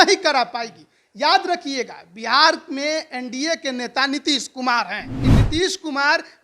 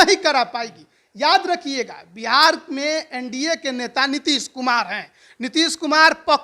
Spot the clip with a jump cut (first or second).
first